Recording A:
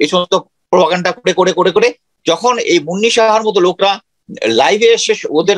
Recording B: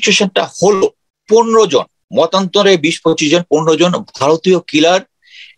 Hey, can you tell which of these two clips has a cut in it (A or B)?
B